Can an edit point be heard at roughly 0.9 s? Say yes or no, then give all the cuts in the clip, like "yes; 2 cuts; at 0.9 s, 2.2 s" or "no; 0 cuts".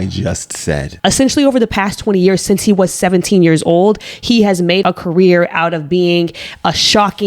yes; 2 cuts; at 0.9 s, 4.8 s